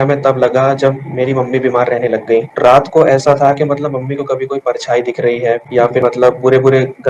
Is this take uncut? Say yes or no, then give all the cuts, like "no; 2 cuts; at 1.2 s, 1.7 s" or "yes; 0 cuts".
no; 1 cut; at 2.5 s